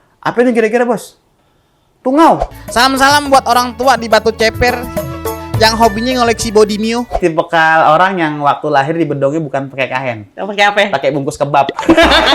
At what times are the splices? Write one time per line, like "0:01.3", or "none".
0:02.6
0:07.1